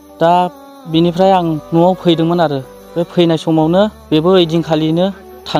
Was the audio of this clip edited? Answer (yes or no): yes